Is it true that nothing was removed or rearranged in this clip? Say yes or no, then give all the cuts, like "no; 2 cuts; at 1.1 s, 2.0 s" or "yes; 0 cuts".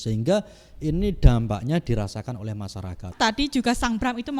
no; 1 cut; at 3.1 s